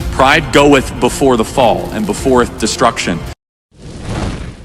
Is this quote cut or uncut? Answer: cut